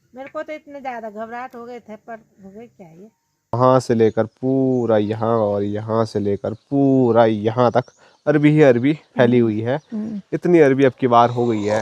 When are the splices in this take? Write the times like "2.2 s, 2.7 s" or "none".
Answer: 3.5 s